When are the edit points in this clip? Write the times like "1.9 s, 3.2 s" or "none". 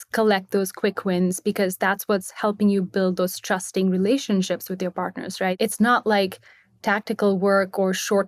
5.5 s

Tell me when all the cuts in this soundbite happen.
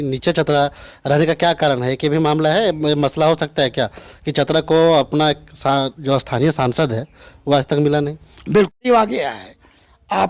8.7 s

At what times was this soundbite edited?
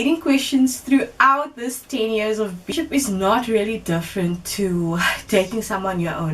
2.7 s

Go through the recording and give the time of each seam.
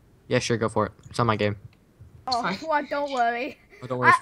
2.3 s

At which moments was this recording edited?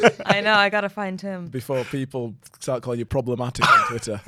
3.1 s

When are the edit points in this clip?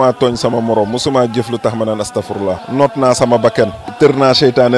2.6 s, 3.8 s

